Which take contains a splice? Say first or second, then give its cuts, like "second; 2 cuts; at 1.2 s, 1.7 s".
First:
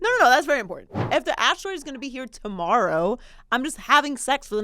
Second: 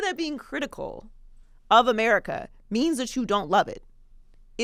first; 1 cut; at 1.1 s